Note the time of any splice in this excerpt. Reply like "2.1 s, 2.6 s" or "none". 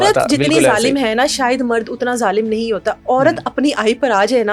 none